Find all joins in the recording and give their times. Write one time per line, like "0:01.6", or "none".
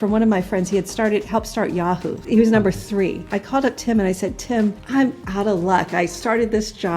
0:02.1
0:03.3
0:04.8